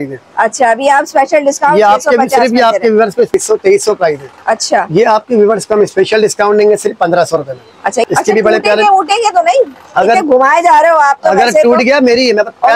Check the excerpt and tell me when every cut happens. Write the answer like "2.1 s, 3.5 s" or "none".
3.3 s, 8.1 s